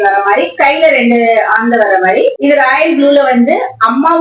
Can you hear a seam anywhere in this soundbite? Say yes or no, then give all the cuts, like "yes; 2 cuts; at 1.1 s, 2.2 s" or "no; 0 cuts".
yes; 1 cut; at 2.4 s